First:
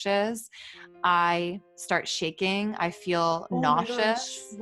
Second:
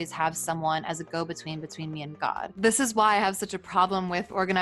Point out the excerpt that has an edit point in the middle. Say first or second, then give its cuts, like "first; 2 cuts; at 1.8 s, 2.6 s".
second; 1 cut; at 2.5 s